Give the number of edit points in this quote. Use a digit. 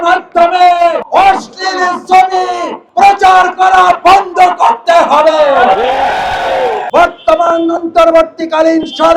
1